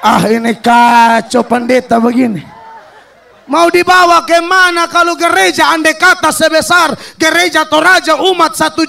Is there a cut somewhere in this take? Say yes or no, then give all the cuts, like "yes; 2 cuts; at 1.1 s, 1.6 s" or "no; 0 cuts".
no; 0 cuts